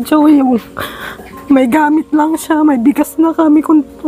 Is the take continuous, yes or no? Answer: yes